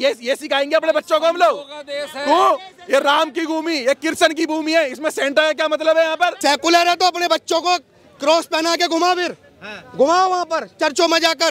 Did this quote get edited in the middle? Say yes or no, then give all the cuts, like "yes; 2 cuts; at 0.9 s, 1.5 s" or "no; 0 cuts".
yes; 1 cut; at 6.4 s